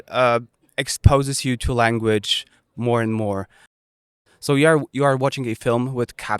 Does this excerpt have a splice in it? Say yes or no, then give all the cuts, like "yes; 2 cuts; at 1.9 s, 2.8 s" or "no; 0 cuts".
yes; 1 cut; at 4.1 s